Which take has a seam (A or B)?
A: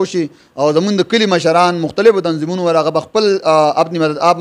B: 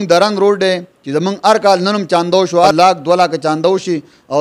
B